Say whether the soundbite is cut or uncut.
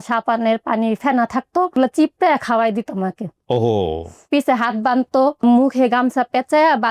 cut